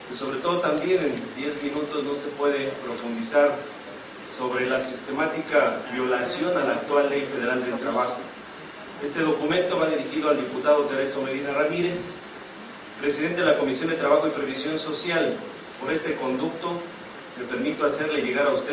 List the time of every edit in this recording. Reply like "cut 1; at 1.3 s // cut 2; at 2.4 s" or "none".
cut 1; at 2.4 s